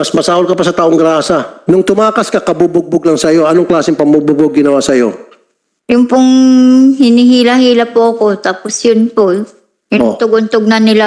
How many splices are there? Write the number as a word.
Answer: one